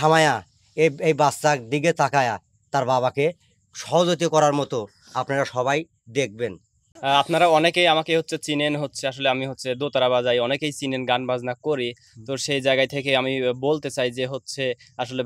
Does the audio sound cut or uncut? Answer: cut